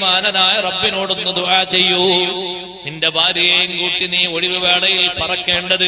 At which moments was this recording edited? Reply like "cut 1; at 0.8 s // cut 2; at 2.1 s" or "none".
none